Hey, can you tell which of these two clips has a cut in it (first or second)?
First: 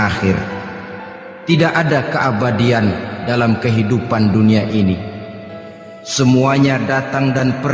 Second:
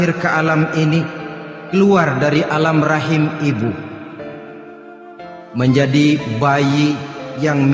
second